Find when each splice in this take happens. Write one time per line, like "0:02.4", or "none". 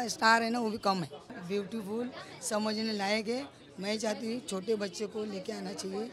0:01.3